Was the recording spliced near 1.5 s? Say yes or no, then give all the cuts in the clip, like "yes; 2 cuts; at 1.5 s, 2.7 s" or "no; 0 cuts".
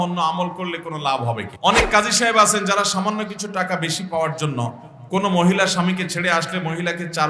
yes; 1 cut; at 1.5 s